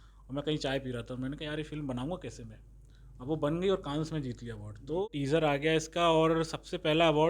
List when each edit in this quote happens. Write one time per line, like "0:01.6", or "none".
0:05.0

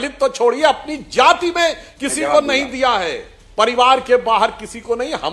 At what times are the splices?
none

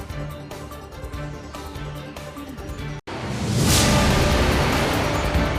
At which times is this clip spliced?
0:01.6
0:03.0

